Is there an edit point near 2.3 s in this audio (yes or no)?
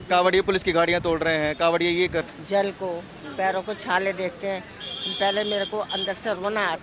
yes